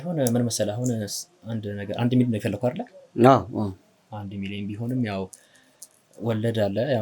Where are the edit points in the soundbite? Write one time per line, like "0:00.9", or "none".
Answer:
none